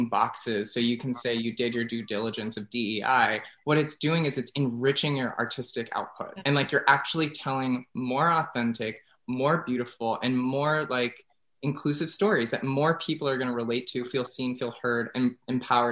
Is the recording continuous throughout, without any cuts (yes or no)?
yes